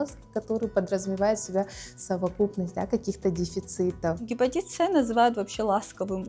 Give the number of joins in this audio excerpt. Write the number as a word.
one